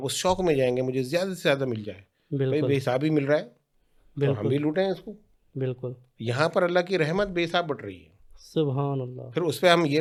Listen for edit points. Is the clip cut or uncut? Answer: uncut